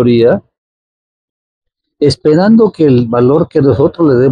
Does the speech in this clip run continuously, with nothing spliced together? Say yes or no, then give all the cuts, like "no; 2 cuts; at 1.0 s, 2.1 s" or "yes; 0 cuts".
yes; 0 cuts